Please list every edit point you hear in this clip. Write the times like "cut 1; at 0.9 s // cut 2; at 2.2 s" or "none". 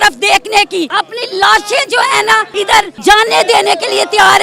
cut 1; at 0.9 s // cut 2; at 2.7 s